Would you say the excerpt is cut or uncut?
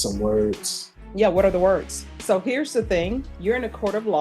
cut